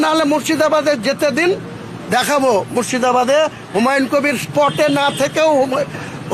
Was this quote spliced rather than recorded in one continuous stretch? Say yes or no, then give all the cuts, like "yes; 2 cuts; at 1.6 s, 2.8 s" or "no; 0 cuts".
no; 0 cuts